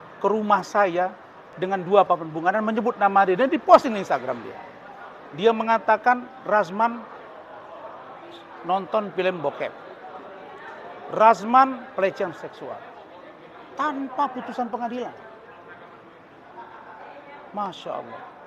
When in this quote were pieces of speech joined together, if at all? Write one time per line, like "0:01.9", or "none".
none